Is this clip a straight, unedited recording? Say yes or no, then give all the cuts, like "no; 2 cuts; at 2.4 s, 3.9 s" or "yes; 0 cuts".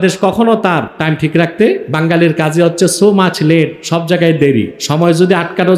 no; 4 cuts; at 0.9 s, 1.9 s, 3.8 s, 4.8 s